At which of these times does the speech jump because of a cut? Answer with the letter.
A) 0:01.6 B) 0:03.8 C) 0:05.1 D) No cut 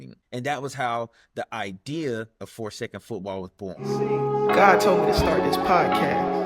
B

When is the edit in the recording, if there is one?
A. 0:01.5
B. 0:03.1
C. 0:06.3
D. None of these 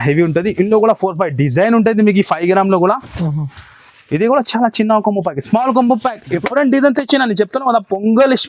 C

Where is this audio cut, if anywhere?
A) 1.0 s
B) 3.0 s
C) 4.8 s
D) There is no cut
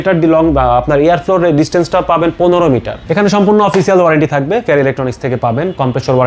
B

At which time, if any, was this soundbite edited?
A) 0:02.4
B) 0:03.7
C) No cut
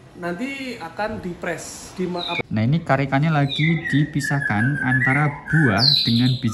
A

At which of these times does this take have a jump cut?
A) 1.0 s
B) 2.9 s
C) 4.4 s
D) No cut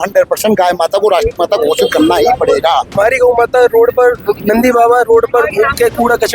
B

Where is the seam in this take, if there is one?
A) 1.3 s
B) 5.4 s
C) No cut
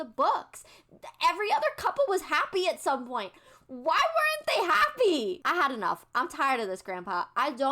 B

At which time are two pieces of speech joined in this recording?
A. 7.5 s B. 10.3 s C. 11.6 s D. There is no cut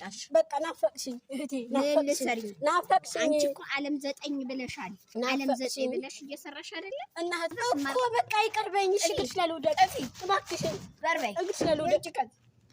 A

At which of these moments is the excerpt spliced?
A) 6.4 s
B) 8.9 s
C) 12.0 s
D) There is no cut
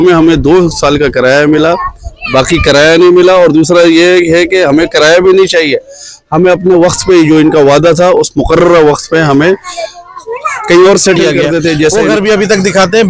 C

